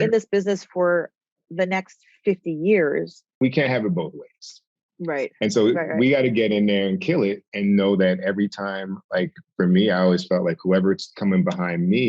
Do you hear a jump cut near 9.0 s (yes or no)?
no